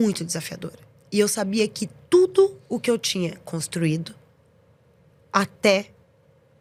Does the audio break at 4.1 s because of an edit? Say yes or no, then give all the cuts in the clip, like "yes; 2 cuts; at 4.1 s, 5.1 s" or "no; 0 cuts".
no; 0 cuts